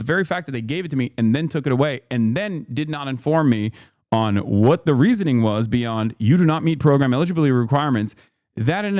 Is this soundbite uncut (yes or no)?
yes